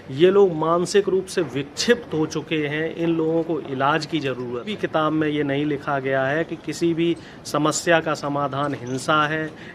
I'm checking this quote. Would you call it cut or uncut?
cut